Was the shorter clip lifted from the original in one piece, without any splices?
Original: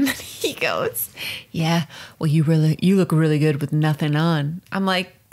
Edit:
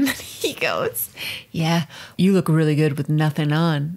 no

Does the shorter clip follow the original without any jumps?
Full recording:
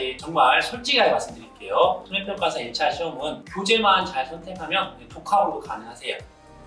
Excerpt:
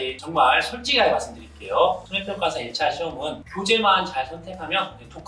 yes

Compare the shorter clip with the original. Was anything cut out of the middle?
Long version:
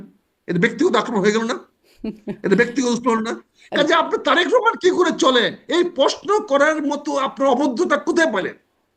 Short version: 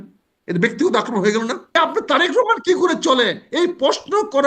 yes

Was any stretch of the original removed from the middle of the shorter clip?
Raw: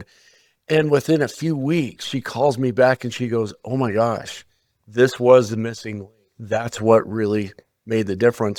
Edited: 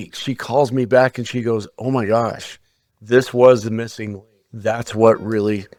no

